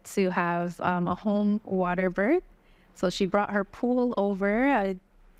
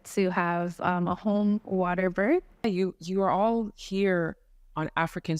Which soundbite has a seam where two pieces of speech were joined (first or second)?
second